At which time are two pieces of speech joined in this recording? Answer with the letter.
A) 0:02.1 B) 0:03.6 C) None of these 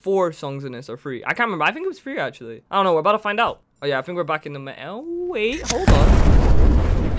C